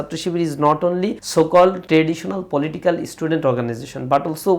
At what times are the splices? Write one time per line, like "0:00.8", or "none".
0:01.2
0:01.8